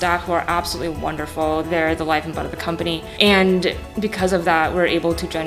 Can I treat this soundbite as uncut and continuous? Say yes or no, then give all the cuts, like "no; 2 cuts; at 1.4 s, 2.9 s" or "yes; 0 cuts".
yes; 0 cuts